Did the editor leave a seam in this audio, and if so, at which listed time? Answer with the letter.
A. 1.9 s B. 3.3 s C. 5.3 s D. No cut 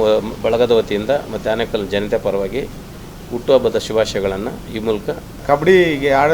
C